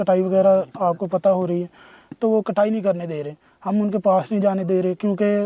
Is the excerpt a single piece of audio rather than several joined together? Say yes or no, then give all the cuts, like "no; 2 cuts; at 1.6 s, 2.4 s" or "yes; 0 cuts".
yes; 0 cuts